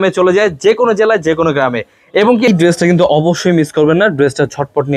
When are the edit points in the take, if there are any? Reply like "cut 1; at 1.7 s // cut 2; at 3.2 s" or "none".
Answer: cut 1; at 2.5 s